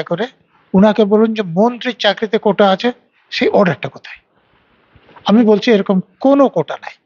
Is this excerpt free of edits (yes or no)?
yes